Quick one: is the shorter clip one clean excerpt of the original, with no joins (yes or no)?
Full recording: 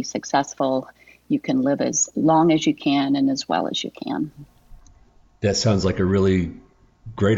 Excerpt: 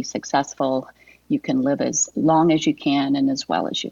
yes